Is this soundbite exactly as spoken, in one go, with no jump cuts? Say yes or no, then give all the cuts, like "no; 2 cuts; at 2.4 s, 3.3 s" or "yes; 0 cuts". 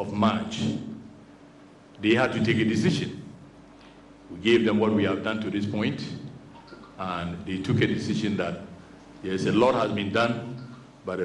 yes; 0 cuts